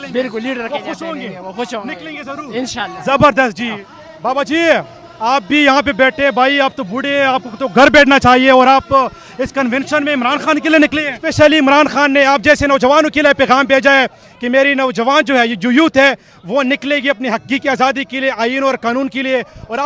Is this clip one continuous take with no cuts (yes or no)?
no